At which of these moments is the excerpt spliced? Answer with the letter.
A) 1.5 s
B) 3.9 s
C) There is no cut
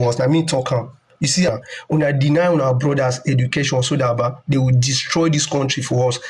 A